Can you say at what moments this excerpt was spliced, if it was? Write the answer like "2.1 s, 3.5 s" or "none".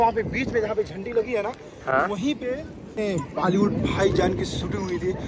3.0 s